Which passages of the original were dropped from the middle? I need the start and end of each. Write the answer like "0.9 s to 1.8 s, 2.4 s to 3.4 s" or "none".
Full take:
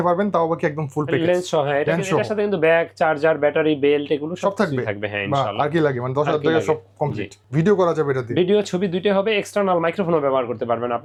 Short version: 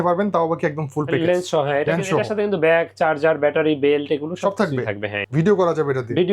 5.1 s to 7.3 s